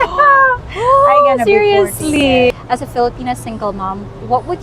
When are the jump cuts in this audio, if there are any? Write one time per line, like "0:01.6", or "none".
0:02.5